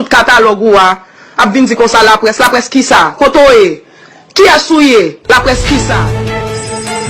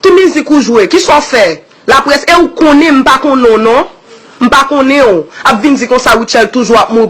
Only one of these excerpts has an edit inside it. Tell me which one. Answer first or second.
first